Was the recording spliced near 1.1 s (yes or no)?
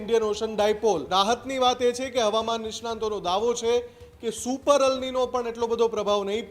yes